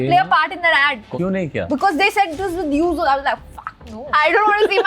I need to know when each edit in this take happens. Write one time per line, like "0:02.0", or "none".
0:01.0
0:04.1

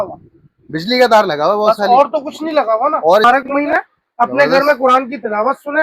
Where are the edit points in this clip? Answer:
0:03.2

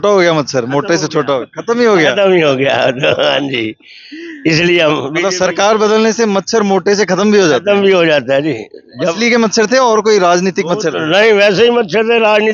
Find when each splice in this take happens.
none

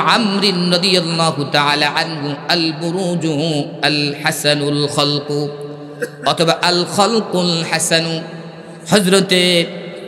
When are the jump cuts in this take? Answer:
none

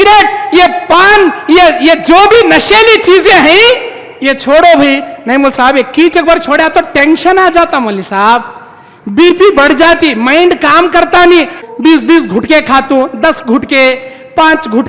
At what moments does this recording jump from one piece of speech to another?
0:11.6

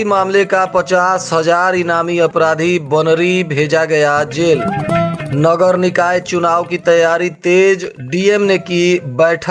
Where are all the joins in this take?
none

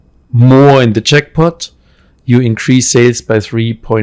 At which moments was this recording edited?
none

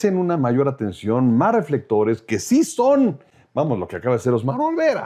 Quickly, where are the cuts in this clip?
none

